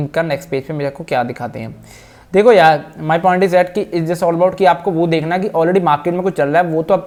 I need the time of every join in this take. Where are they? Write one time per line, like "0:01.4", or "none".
none

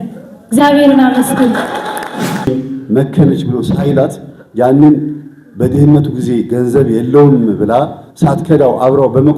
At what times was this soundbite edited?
0:02.5

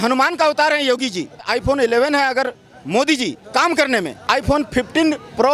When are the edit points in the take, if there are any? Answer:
0:01.4
0:04.2

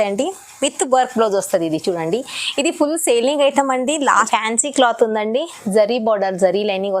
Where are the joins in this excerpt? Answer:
0:04.1

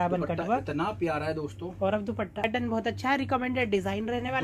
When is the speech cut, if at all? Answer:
0:02.4

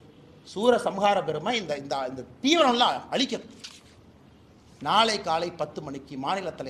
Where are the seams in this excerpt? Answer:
none

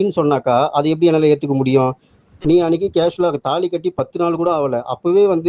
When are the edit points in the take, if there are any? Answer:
0:02.1

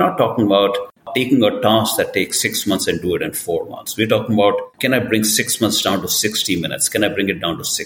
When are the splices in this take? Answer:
0:04.7

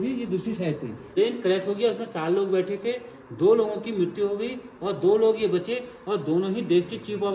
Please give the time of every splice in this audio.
0:01.1

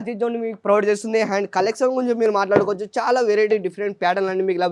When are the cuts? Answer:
none

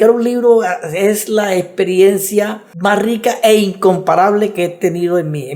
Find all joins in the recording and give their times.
none

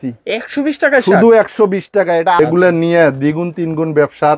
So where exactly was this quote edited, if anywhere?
0:02.4

